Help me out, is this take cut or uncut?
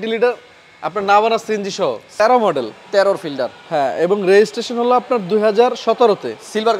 cut